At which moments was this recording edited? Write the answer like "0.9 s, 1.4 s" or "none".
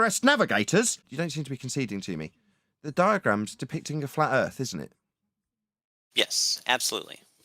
1.0 s